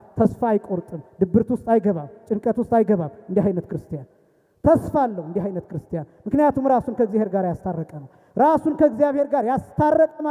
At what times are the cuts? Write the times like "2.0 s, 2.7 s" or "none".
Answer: none